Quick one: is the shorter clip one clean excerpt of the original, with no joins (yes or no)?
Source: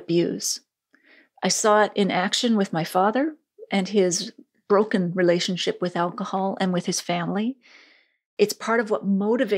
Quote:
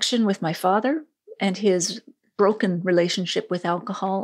yes